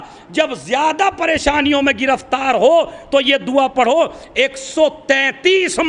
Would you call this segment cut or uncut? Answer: uncut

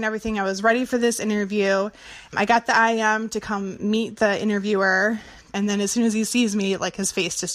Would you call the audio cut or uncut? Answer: cut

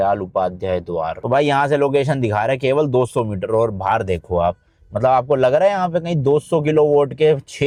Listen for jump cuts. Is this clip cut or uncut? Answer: uncut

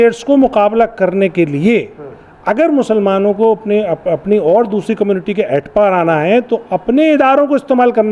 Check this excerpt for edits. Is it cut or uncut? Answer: uncut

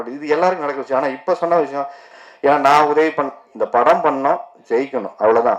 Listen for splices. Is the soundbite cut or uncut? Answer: cut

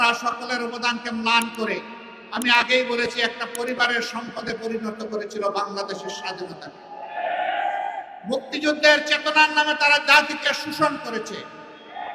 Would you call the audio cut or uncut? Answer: uncut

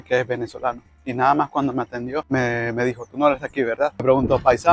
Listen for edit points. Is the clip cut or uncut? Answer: cut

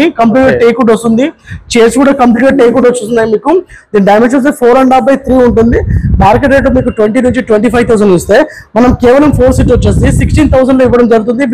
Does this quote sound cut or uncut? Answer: uncut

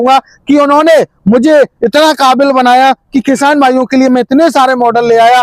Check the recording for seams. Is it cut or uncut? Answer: uncut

